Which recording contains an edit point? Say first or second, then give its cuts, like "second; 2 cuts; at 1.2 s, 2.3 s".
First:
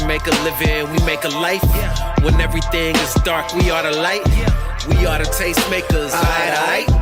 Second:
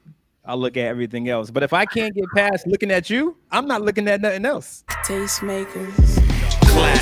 second; 1 cut; at 5.0 s